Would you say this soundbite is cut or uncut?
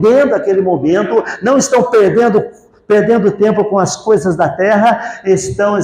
uncut